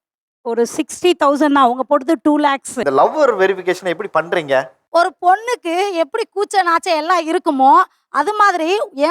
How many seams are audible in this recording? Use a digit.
1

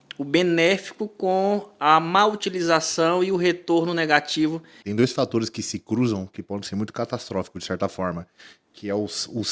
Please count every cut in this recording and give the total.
1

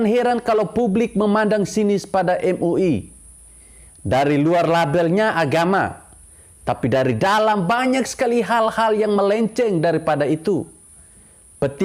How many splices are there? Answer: 0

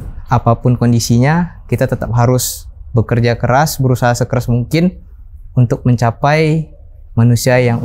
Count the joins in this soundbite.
0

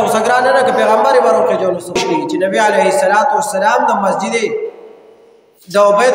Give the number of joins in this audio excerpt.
1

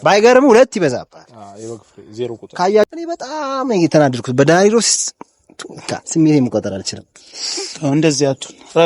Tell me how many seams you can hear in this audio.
1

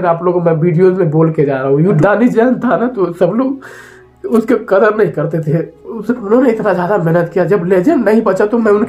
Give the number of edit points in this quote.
1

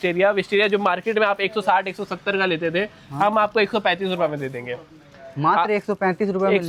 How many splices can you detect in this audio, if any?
0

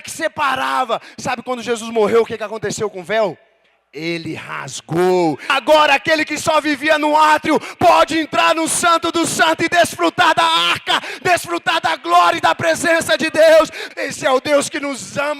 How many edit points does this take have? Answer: 2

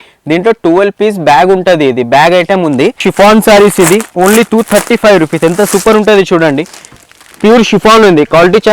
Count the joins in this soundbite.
1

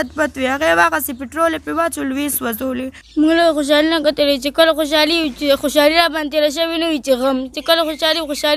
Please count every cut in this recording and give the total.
1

